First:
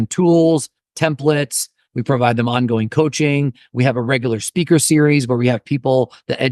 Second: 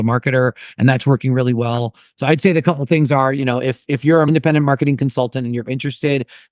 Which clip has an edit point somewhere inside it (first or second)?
second